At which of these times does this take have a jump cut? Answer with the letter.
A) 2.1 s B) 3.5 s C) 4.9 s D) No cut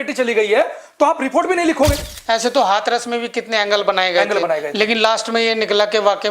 A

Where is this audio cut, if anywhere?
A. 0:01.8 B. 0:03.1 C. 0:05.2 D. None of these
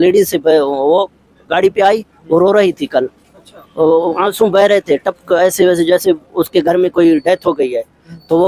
D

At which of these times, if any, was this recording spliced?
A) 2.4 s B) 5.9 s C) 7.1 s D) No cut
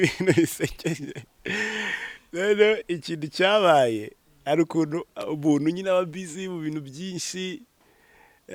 D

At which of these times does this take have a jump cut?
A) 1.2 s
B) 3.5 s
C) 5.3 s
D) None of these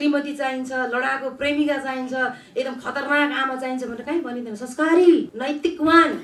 C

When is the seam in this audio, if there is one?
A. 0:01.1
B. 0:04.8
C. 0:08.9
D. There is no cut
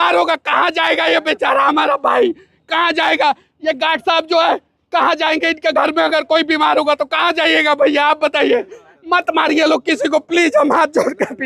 D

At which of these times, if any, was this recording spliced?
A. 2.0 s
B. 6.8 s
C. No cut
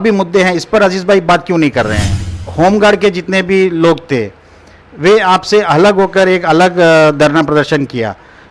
A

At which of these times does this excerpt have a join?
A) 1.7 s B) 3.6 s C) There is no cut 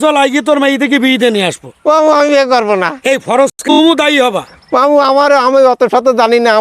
B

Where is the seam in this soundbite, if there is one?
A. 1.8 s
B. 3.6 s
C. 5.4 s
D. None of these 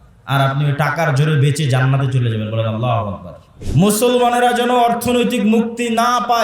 B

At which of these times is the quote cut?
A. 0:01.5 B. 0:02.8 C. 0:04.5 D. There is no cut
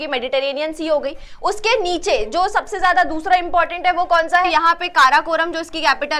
C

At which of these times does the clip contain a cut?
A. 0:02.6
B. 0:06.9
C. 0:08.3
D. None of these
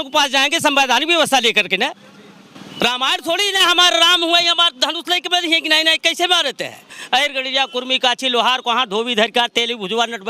B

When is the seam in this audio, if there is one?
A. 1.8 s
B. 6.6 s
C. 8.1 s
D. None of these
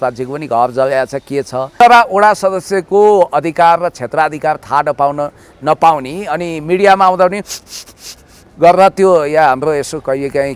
A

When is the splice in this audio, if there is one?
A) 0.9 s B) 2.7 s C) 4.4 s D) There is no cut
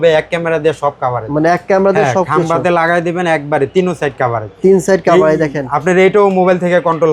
D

